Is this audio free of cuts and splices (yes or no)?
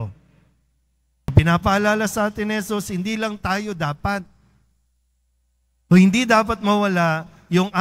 no